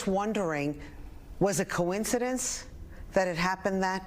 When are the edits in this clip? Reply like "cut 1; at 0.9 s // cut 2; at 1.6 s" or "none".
cut 1; at 2.5 s